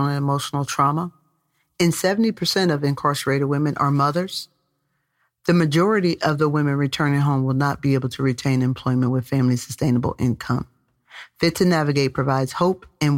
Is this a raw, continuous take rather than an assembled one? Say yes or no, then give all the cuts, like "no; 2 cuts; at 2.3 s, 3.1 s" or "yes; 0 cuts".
yes; 0 cuts